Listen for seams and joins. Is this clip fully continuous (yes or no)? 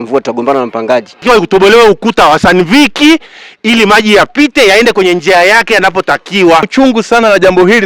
no